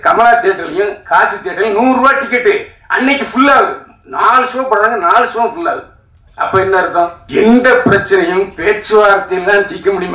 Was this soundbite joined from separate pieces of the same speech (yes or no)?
yes